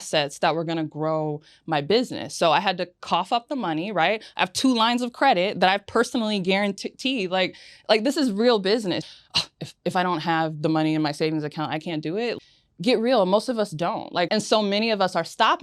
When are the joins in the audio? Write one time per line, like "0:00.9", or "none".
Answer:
0:09.0
0:12.4
0:14.3

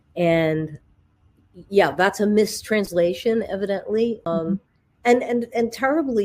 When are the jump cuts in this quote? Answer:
0:04.3

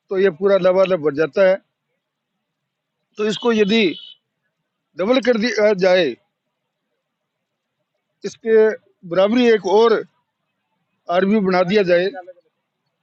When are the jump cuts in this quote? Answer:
none

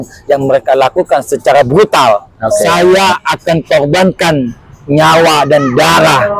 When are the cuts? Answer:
0:02.5

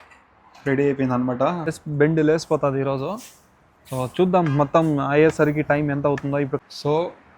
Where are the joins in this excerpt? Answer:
0:01.7
0:06.5

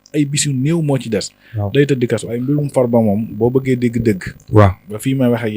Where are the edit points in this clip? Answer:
0:02.3

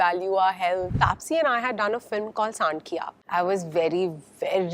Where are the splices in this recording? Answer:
0:00.9
0:03.2

